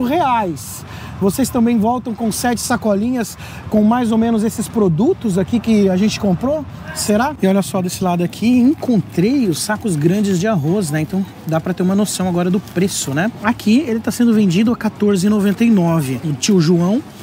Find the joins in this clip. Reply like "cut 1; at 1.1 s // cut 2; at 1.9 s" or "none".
cut 1; at 7.3 s // cut 2; at 13.4 s // cut 3; at 16.2 s